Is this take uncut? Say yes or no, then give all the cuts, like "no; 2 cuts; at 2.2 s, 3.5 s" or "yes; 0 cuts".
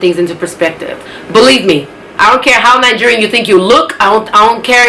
no; 1 cut; at 1.0 s